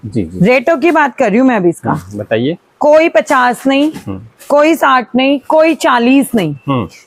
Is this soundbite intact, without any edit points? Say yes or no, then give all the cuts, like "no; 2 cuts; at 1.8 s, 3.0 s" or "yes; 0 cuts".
yes; 0 cuts